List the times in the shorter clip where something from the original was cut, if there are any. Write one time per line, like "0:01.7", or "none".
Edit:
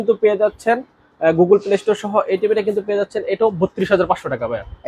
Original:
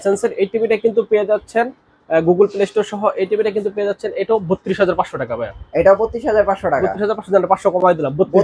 none